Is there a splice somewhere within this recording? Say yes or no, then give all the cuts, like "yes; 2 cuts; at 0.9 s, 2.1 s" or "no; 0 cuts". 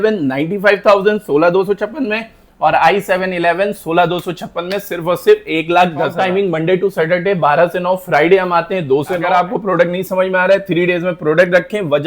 yes; 2 cuts; at 6.2 s, 9.2 s